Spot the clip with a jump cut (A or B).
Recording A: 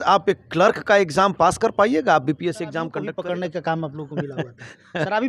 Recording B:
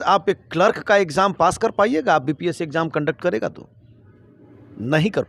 A